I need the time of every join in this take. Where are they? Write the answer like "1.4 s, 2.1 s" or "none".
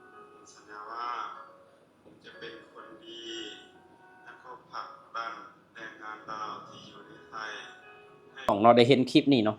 8.5 s